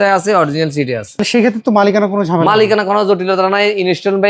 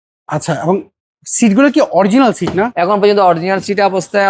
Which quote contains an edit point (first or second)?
first